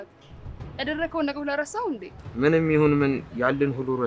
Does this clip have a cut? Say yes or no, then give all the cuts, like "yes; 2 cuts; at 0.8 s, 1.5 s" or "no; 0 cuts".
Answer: yes; 1 cut; at 2.2 s